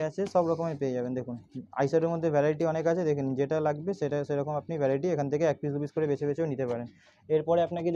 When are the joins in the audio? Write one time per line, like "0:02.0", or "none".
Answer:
none